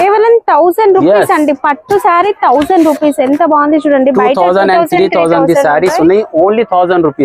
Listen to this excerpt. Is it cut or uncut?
uncut